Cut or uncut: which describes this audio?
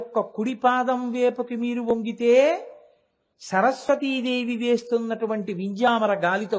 uncut